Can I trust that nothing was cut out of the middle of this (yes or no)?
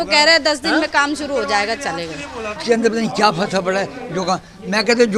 yes